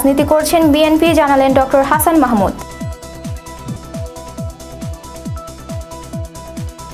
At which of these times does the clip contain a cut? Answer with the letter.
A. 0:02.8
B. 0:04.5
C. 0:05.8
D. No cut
D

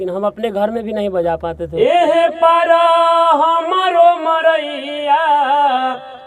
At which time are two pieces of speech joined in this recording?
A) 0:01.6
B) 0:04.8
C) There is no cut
A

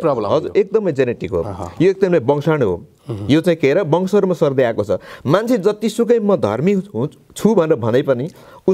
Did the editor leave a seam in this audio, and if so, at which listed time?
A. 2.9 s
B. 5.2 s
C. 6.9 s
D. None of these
D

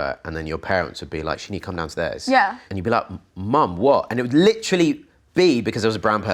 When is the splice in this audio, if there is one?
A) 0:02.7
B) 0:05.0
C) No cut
A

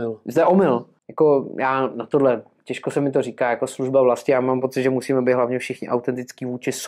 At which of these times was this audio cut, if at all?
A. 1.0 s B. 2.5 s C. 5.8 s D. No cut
A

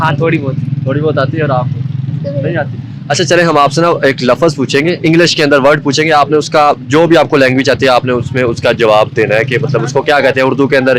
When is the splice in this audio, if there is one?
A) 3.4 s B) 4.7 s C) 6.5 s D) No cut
D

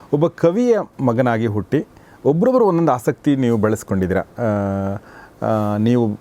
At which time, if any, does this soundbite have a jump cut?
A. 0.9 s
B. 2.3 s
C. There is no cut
A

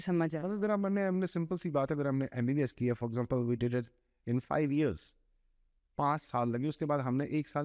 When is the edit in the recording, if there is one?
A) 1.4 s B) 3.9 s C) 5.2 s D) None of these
D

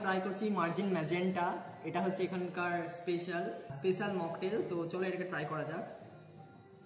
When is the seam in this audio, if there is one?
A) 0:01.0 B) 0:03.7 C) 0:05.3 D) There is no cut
D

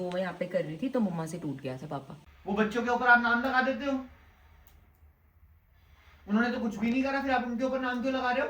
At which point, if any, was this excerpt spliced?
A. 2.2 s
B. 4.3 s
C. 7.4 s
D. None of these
A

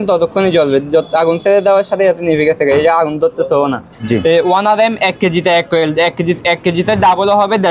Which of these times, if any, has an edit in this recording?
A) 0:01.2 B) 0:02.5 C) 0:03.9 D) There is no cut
C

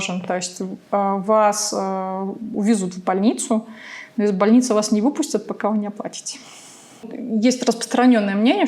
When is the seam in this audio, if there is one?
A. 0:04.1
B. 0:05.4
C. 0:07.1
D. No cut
C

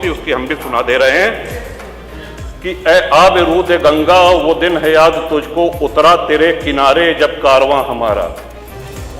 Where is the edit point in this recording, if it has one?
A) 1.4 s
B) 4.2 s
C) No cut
C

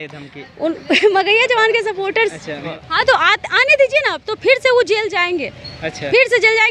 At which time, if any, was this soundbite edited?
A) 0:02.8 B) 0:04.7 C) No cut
A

